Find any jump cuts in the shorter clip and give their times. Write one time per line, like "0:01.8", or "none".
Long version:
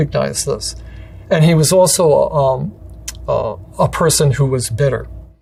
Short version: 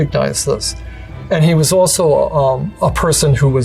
0:02.7